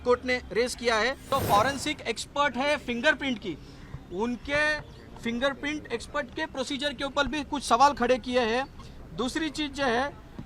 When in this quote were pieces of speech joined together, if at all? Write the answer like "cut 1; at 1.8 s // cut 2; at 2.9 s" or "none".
cut 1; at 1.2 s